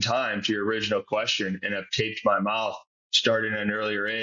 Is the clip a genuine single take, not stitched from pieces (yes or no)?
yes